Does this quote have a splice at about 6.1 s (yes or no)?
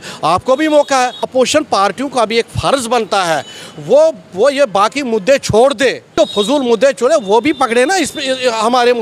yes